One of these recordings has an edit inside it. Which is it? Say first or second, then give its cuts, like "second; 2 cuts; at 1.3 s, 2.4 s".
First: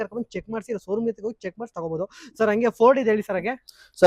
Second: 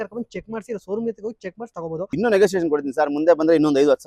second; 1 cut; at 2.1 s